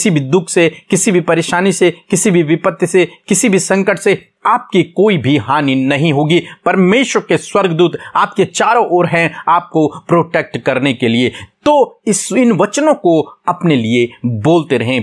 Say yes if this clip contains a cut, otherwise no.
no